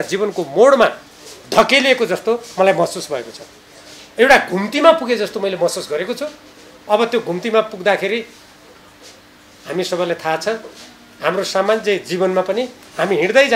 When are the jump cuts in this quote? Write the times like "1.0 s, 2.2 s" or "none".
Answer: none